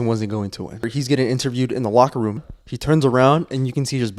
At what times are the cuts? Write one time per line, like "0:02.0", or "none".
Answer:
0:00.9
0:02.4